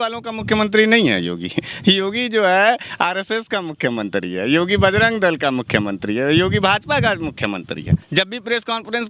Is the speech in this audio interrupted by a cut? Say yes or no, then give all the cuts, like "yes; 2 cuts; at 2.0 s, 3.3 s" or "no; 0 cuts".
yes; 1 cut; at 8.1 s